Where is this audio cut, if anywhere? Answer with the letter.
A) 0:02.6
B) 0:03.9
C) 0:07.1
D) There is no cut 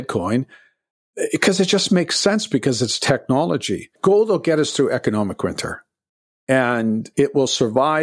B